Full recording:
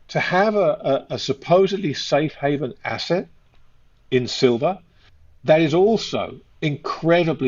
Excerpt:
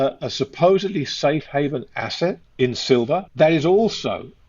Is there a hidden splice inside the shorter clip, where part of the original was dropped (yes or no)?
yes